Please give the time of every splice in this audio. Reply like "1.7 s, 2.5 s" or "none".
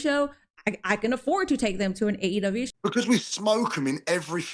2.7 s